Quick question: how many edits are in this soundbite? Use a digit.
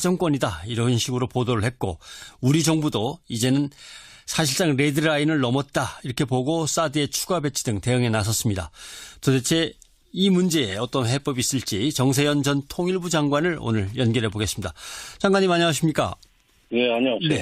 1